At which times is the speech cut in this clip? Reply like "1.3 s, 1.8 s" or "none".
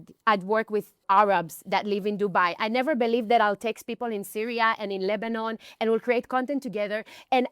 1.0 s